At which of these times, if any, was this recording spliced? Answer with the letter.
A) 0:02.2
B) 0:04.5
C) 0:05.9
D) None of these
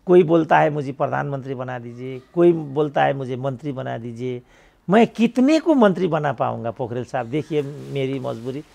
D